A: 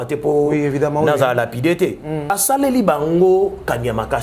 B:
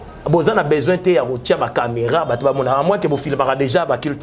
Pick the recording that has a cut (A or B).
A